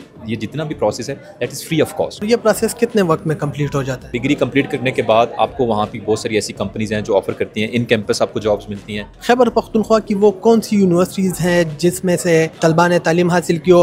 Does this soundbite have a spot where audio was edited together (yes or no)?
yes